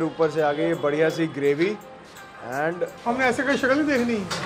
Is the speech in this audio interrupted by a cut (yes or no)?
yes